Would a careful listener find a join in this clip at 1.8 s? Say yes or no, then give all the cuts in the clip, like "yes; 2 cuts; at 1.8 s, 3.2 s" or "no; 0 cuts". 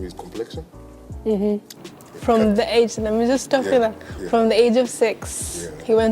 yes; 1 cut; at 1.8 s